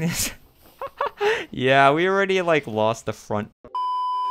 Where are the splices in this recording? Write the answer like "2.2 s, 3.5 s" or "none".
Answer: none